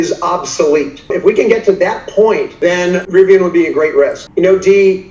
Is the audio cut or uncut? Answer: cut